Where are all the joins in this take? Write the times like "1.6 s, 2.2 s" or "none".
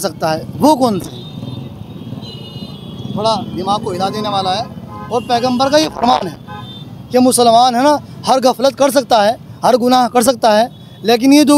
none